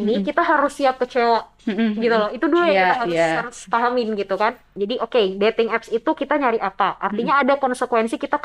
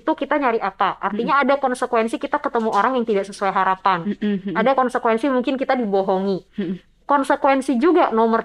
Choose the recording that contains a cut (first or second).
first